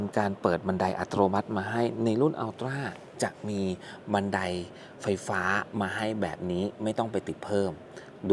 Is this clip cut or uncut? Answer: uncut